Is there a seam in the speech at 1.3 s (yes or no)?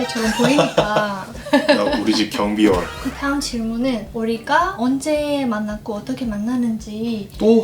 yes